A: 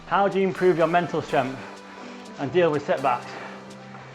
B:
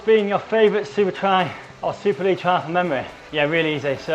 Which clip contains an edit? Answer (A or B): B